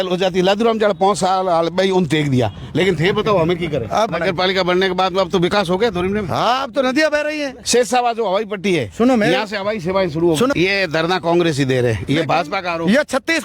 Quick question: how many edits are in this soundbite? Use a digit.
3